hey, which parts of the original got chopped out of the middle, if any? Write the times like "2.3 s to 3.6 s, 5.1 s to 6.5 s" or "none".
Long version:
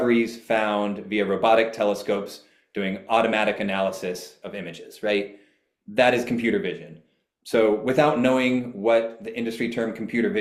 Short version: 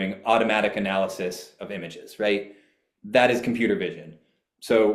none